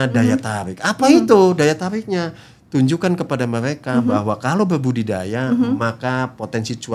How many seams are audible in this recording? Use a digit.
0